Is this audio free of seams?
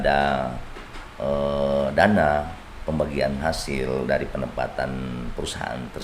yes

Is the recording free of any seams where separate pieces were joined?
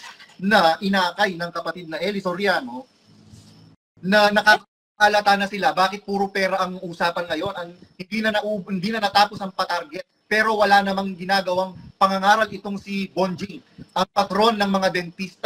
yes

